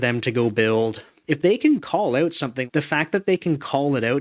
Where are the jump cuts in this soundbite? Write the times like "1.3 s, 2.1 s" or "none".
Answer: 1.1 s, 2.7 s